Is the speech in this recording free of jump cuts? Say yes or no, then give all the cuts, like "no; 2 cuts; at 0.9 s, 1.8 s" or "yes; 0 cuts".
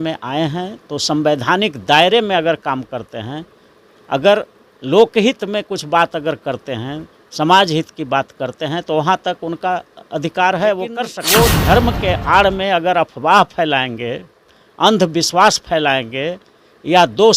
no; 1 cut; at 11.1 s